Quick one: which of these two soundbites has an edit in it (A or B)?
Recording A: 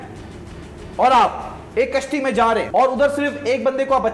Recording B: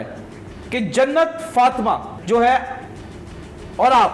A